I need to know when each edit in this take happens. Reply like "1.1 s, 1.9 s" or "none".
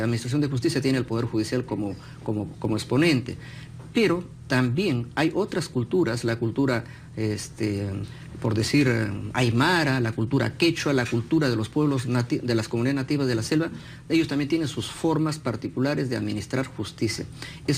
16.4 s